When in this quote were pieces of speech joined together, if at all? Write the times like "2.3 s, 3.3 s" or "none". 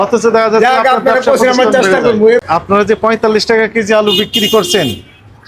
2.4 s